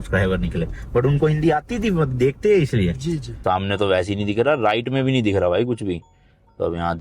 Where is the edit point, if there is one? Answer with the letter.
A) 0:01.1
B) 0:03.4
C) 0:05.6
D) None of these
B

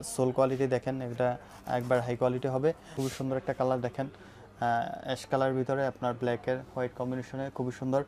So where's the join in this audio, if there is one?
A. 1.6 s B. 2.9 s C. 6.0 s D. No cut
B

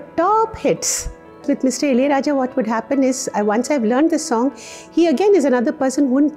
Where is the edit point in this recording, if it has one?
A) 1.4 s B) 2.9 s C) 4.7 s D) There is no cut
A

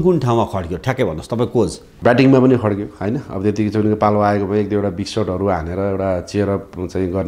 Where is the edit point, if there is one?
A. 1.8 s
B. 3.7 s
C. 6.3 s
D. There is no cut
A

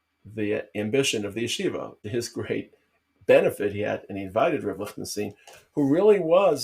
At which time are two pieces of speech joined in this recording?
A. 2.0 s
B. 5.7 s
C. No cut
A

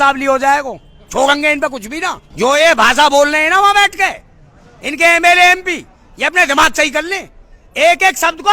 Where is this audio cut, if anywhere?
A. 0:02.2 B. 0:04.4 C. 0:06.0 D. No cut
A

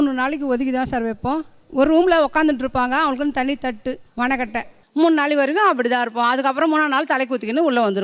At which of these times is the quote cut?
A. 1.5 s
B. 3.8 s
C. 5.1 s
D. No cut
D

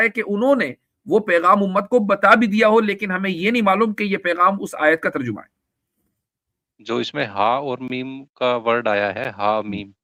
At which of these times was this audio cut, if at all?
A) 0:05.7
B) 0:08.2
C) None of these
C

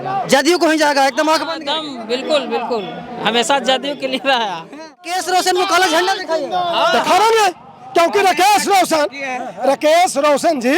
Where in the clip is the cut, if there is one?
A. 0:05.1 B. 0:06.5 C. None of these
A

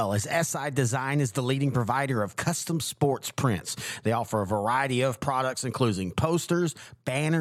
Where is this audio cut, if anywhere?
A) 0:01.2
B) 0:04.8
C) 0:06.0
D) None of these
D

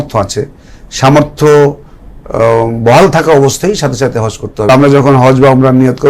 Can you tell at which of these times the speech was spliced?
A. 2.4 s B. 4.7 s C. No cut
B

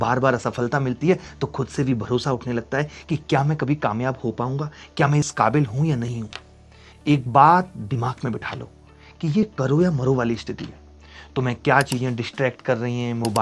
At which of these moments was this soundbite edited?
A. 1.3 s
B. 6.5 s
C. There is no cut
C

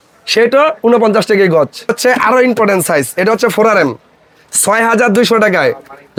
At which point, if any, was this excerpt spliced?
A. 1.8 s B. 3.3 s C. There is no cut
C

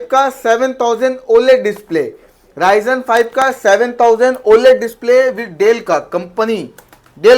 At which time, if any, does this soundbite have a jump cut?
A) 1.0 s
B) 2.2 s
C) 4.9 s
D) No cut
D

